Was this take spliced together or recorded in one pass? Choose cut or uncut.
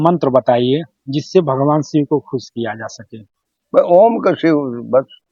uncut